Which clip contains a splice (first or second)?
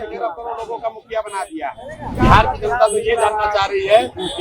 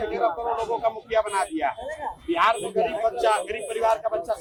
first